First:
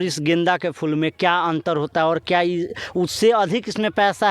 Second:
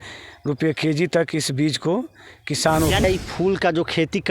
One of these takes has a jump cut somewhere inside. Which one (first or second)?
second